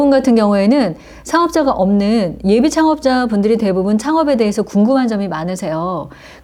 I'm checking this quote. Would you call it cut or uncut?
uncut